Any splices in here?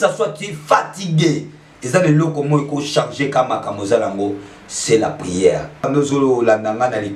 yes; 1 cut; at 5.8 s

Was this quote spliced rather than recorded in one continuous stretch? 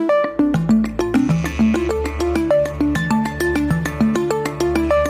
yes; 1 cut; at 1.7 s

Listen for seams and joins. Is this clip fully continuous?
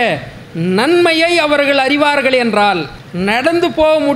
no; 1 cut; at 3.0 s

